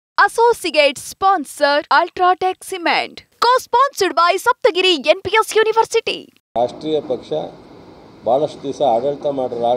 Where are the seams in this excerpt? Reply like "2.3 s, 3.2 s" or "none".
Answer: 6.4 s

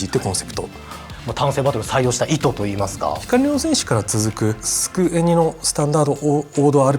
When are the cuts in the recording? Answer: 1.2 s, 3.2 s, 4.7 s

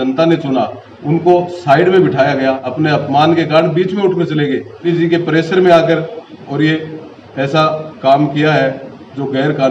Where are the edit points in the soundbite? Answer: 2.7 s, 4.8 s

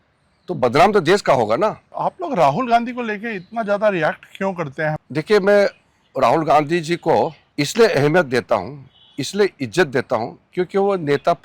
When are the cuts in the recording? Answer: 2.0 s, 5.0 s, 7.4 s

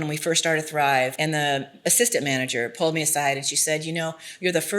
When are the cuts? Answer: 1.1 s

